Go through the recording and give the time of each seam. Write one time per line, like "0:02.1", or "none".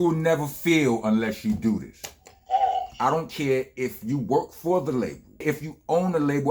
0:05.4